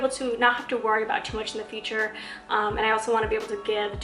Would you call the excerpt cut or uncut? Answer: uncut